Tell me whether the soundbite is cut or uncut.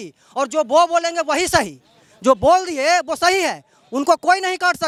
uncut